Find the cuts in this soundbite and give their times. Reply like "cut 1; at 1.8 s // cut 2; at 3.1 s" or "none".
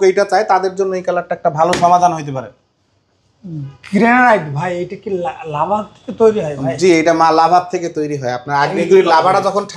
none